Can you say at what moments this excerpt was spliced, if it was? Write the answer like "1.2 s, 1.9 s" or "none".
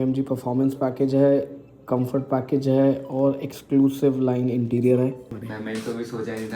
5.3 s